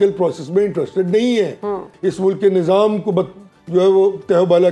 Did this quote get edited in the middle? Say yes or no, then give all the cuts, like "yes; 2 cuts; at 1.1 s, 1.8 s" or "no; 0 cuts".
yes; 1 cut; at 1.9 s